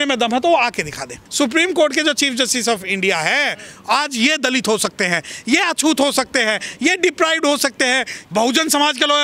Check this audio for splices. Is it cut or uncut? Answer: cut